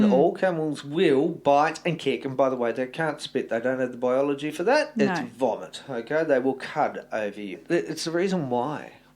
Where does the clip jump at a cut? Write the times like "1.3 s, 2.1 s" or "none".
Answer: 7.6 s

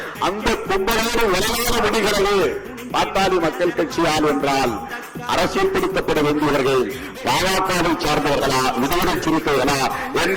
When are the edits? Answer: none

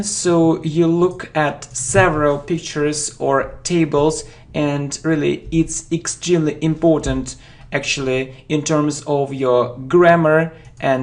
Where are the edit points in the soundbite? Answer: 9.8 s

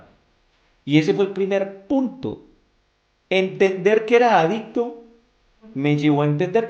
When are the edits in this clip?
none

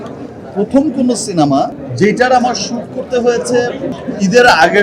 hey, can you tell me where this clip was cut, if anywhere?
1.8 s, 3.9 s

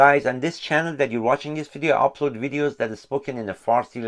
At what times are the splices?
none

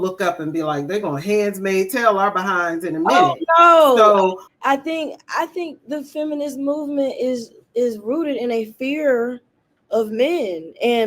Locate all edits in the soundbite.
4.4 s

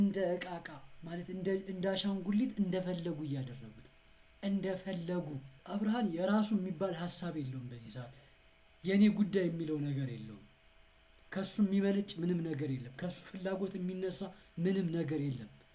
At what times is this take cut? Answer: none

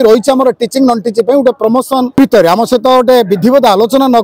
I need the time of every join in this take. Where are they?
2.2 s

